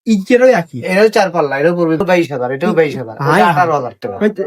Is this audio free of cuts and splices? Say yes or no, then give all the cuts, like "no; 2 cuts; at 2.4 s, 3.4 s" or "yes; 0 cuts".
no; 1 cut; at 2.0 s